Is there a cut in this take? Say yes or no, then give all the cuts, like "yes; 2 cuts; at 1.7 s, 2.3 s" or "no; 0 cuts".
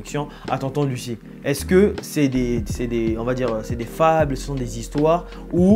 no; 0 cuts